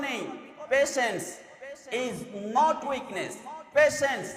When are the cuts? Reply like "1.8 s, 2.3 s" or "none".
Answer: none

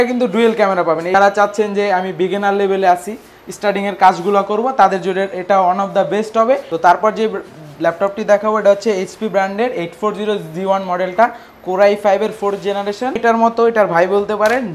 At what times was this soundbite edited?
1.1 s, 6.7 s, 13.2 s

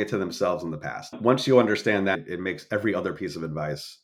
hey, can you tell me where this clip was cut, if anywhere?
1.0 s

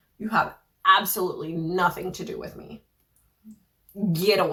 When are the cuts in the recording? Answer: none

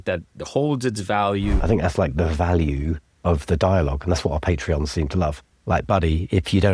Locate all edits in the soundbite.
1.6 s, 3.0 s, 5.5 s

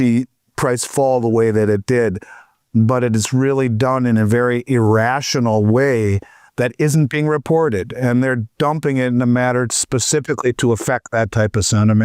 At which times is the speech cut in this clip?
none

